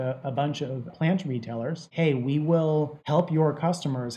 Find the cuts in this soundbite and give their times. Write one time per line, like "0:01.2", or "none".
0:00.9
0:01.9
0:03.0